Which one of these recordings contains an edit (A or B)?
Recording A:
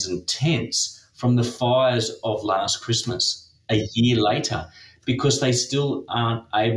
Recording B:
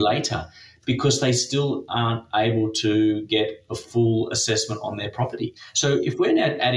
B